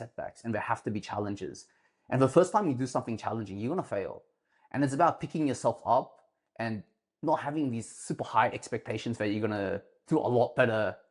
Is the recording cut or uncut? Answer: uncut